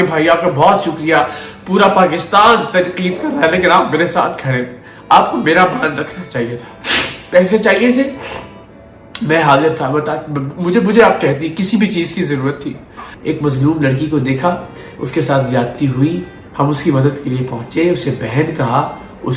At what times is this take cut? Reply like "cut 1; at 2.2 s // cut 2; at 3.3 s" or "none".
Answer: cut 1; at 13.1 s